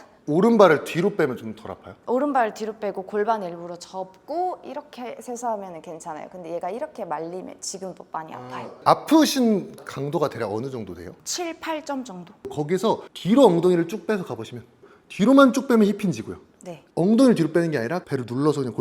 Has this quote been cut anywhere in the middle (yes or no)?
yes